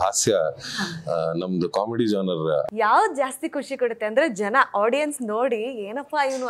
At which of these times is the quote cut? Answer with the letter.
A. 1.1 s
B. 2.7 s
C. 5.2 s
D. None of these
B